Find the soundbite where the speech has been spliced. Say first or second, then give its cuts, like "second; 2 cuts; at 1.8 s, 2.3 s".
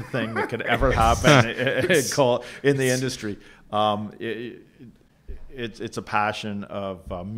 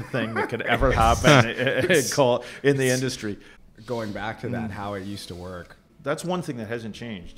second; 2 cuts; at 3.5 s, 5.9 s